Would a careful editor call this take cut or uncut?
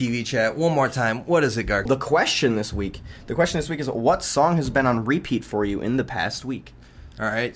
cut